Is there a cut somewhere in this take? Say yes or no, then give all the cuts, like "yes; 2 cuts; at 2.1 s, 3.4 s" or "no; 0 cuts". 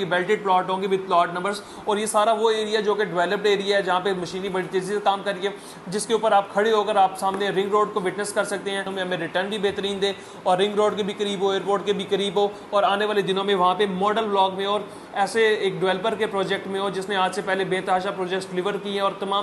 yes; 1 cut; at 8.9 s